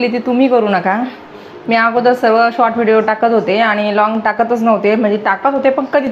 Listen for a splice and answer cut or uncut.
uncut